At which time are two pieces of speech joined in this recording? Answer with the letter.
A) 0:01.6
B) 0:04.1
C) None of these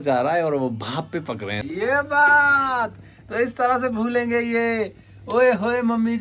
A